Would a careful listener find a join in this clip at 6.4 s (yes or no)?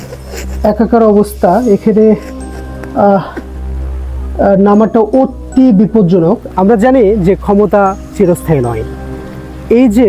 yes